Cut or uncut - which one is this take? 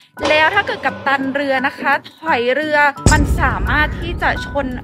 cut